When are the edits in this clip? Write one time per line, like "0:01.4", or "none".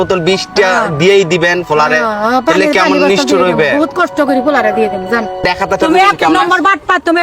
0:05.5